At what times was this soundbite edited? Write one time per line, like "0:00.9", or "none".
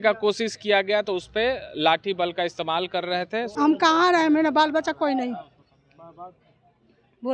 0:03.4